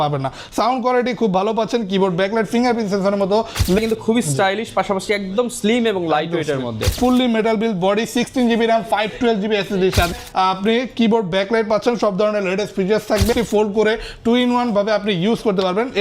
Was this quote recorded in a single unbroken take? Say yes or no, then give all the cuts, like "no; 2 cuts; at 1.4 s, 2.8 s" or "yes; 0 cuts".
no; 4 cuts; at 3.8 s, 6.9 s, 10.1 s, 13.3 s